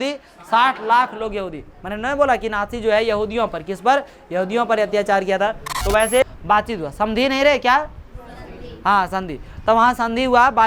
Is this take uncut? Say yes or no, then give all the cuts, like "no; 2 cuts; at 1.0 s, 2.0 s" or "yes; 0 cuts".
no; 1 cut; at 6.2 s